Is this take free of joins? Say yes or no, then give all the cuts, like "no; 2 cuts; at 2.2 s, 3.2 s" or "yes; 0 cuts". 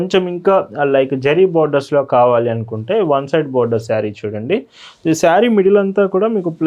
yes; 0 cuts